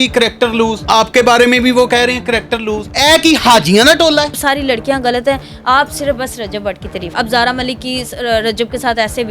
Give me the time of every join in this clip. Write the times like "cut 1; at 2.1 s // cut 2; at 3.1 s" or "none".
cut 1; at 0.8 s // cut 2; at 2.9 s // cut 3; at 4.4 s // cut 4; at 7.1 s